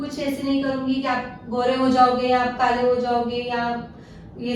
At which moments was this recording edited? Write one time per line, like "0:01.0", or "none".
none